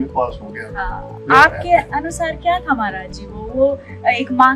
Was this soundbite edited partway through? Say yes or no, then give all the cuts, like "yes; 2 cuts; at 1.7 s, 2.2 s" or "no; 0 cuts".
yes; 1 cut; at 1.1 s